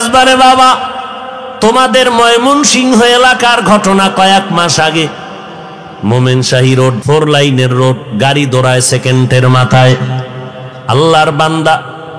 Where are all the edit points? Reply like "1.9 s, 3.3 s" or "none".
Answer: 7.0 s